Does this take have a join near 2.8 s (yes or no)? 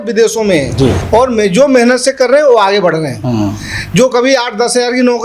no